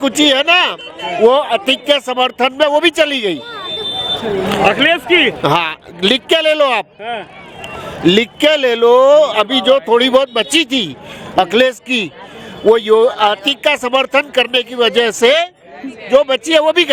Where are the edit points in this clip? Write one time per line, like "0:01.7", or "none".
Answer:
none